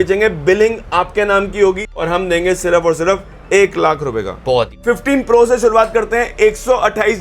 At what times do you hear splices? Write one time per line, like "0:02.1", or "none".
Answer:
0:01.9
0:04.7

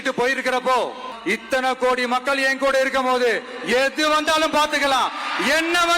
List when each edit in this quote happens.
0:01.1

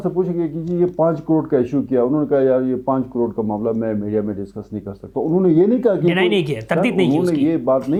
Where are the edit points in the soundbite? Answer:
none

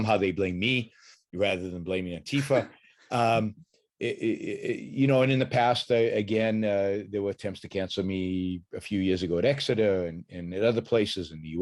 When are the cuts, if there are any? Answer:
none

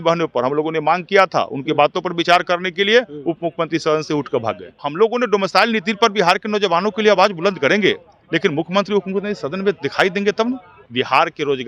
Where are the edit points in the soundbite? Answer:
0:04.8
0:10.8

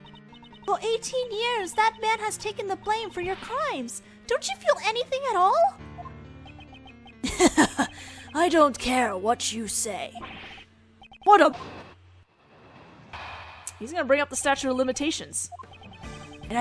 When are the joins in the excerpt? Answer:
none

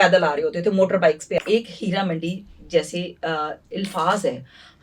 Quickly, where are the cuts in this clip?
0:01.4

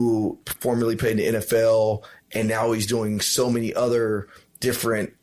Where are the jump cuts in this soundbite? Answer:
none

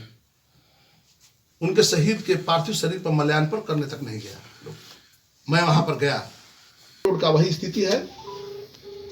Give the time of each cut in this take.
0:07.1

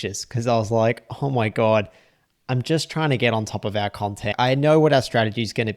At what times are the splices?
0:04.3

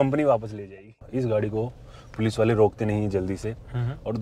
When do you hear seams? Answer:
0:00.9

